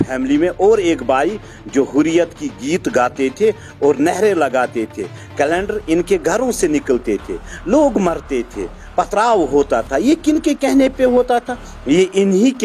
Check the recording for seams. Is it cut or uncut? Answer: uncut